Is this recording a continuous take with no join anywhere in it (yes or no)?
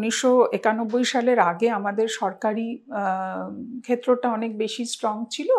yes